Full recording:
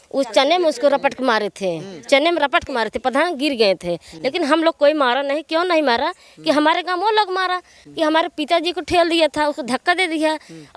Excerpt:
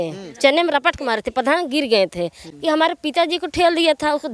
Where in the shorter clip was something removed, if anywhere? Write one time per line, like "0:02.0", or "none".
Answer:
0:02.4